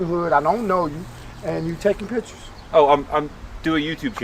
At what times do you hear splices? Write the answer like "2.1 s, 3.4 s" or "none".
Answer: none